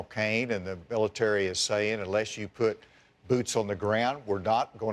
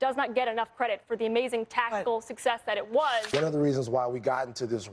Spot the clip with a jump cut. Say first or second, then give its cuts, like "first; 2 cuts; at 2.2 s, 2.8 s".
second; 1 cut; at 3.3 s